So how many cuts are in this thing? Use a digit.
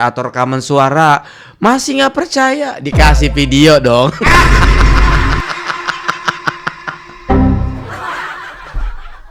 0